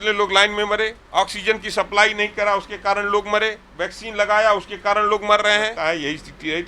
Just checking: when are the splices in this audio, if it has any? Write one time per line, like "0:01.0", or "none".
0:01.0
0:03.6
0:05.7